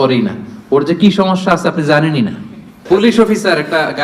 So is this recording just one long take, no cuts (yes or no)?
no